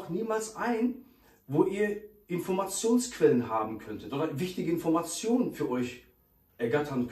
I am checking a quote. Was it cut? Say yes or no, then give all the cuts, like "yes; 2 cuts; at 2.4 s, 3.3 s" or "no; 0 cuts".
no; 0 cuts